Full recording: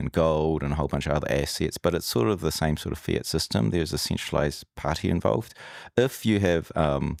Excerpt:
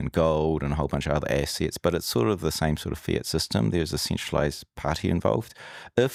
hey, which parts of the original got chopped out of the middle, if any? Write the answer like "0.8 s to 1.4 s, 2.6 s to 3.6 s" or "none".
none